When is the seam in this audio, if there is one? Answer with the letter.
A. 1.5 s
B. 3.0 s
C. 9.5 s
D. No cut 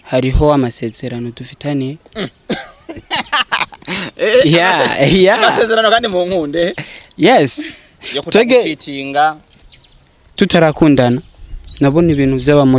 C